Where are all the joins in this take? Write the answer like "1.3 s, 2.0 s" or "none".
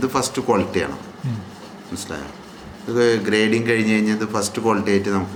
none